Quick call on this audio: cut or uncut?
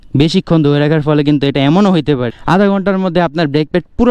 cut